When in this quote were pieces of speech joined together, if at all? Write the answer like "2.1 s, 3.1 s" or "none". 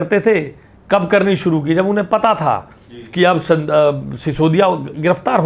none